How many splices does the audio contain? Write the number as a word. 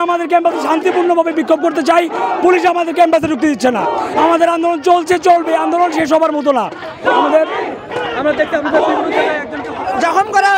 zero